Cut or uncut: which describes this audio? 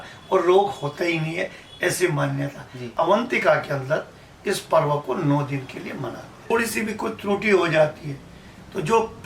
cut